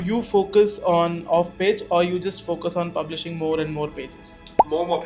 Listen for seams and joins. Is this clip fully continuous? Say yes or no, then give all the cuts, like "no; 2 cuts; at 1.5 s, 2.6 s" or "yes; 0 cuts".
yes; 0 cuts